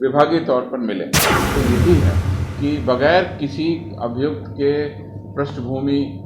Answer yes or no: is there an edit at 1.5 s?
yes